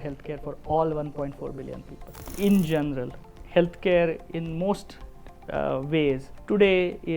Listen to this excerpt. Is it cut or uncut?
cut